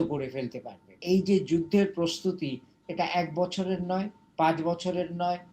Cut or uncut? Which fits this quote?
cut